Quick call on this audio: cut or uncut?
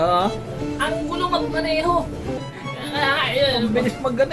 cut